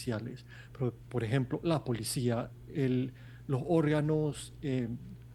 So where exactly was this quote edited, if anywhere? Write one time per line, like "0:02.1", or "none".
none